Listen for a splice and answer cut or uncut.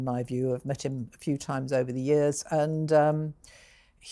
uncut